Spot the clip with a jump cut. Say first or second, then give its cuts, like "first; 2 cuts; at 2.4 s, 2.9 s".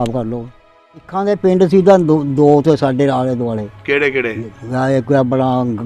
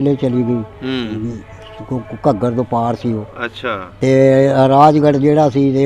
first; 1 cut; at 1.1 s